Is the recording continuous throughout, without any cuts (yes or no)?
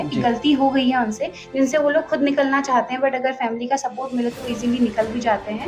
yes